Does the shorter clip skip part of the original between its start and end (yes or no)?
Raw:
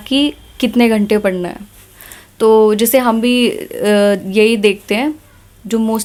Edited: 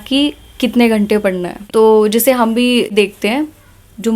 yes